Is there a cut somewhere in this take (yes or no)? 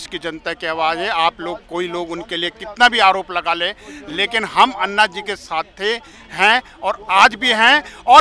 no